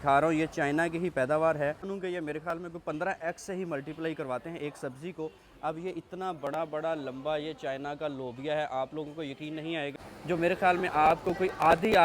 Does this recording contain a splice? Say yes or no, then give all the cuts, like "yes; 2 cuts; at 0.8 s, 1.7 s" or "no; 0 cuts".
yes; 2 cuts; at 1.9 s, 10.1 s